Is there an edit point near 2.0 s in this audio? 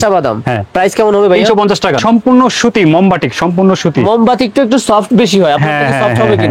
yes; 1 cut; at 2.0 s

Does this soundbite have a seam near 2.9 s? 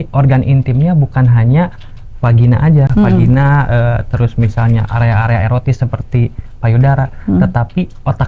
no; 0 cuts

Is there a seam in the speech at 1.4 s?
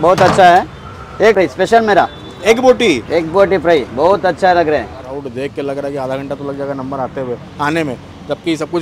yes; 2 cuts; at 1.4 s, 5.1 s

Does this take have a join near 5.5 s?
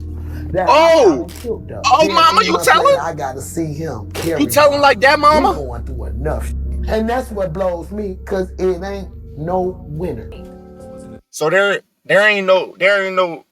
no; 0 cuts

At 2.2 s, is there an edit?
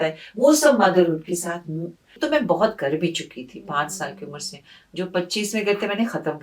yes; 1 cut; at 2.2 s

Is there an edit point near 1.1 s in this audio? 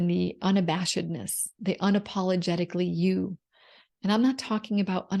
no; 0 cuts

